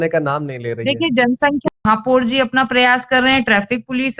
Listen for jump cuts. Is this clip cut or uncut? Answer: cut